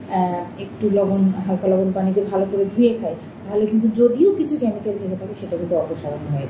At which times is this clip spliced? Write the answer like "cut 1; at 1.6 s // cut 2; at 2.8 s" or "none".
none